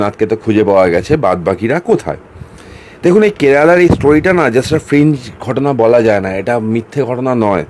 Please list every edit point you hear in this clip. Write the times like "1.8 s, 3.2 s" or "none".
none